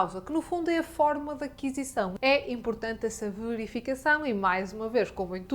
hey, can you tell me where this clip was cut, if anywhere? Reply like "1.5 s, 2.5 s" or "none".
2.1 s